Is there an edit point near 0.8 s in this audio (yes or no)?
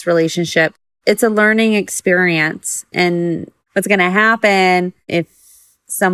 yes